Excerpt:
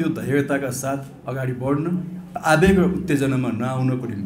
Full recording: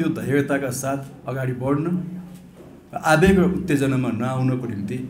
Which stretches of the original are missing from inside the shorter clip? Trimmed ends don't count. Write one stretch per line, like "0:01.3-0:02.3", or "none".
0:02.2-0:02.8